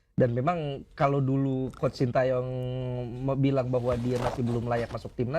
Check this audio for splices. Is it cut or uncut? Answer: uncut